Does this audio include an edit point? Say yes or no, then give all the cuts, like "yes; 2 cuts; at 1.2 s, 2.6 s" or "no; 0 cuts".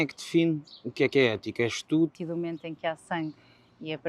yes; 1 cut; at 2.1 s